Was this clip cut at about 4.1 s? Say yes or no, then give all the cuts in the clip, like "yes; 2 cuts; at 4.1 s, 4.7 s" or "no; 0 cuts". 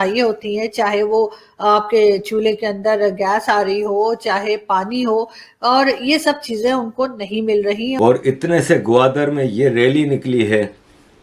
no; 1 cut; at 7.9 s